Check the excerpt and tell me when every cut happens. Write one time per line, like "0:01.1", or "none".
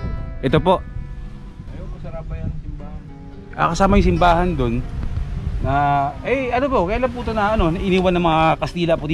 none